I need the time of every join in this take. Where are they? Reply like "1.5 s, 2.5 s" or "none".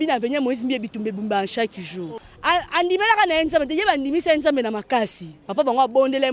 2.3 s